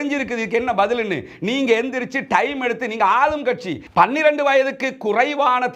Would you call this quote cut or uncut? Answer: cut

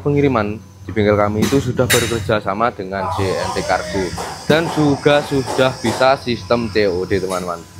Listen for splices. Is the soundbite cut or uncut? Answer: uncut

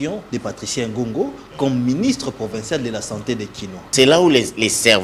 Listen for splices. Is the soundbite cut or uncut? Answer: cut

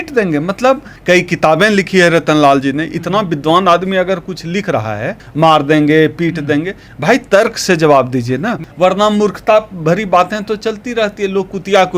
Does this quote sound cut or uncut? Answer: cut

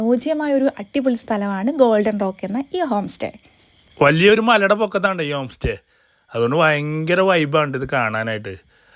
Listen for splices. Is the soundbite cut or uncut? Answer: uncut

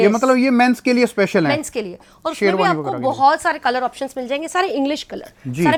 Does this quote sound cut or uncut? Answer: uncut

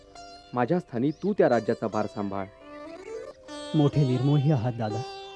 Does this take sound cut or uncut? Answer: cut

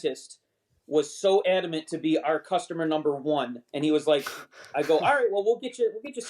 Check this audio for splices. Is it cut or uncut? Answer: uncut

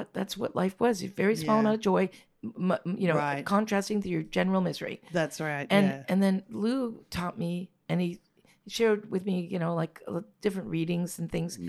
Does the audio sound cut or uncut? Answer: uncut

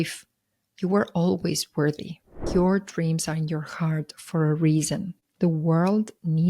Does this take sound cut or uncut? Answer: cut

